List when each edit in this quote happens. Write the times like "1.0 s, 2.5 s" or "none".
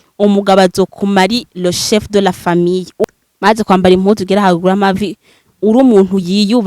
3.0 s